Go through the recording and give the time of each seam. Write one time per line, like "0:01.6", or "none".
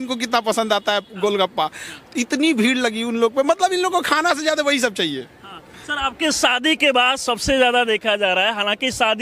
none